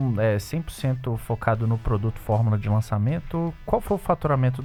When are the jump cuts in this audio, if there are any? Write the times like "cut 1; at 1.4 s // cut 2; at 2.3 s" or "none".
none